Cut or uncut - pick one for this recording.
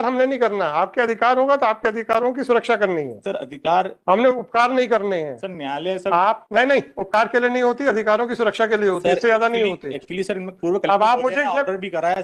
uncut